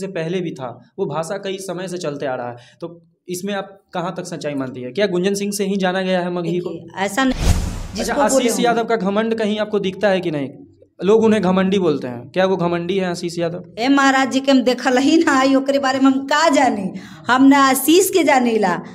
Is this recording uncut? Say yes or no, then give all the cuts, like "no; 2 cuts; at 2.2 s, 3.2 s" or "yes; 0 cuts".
no; 1 cut; at 7.3 s